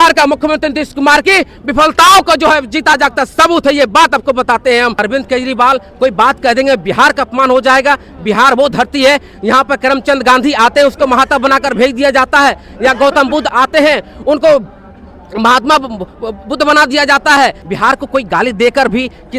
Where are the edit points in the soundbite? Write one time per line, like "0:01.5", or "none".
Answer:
0:05.0
0:13.5
0:17.6